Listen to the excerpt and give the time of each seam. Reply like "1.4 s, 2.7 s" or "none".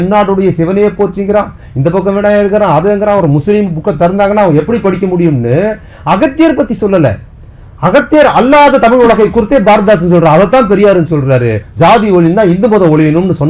11.7 s